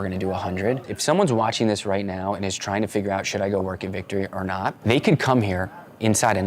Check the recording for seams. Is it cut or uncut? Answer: cut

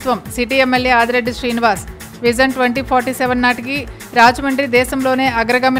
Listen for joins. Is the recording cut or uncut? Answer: uncut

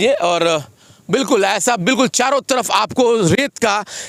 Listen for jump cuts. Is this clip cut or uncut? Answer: uncut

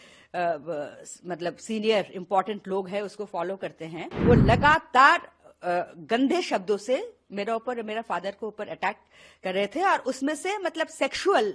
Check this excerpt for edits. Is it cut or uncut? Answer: cut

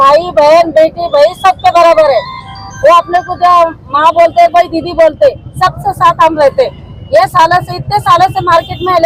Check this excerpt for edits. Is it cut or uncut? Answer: uncut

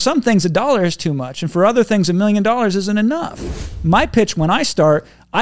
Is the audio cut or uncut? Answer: cut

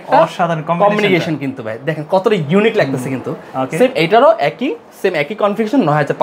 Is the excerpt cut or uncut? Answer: uncut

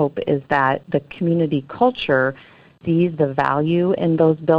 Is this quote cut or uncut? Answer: cut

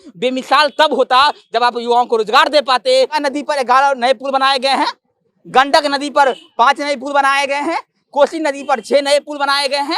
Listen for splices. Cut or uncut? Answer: cut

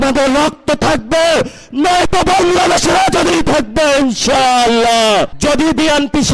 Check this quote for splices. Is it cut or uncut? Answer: cut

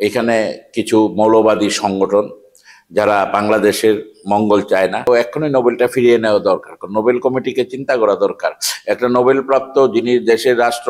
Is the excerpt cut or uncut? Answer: cut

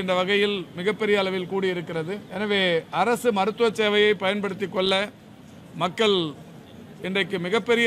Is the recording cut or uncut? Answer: cut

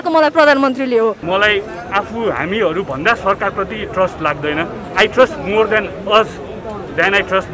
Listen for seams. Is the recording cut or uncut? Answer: cut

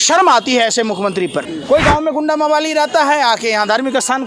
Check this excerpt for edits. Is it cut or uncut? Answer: cut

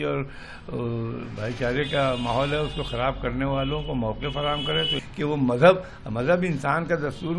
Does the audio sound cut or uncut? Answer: cut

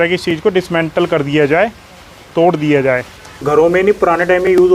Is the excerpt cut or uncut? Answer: cut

